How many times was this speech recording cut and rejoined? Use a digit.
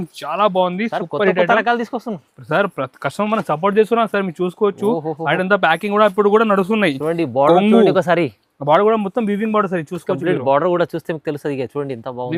0